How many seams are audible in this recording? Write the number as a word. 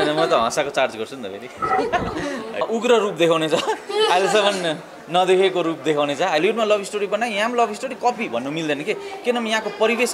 two